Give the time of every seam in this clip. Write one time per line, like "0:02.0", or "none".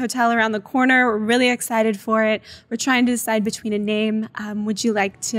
none